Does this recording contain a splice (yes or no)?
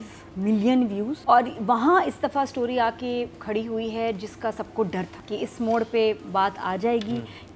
yes